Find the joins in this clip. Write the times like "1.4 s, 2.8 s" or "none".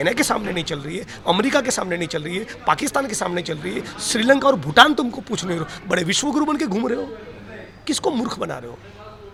none